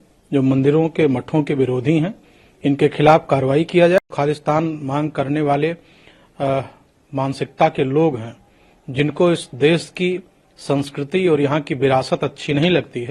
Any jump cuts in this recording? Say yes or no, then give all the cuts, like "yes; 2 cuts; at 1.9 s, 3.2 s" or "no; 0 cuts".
yes; 1 cut; at 4.0 s